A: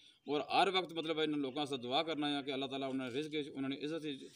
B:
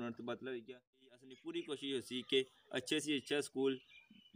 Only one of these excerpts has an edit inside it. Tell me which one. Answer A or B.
B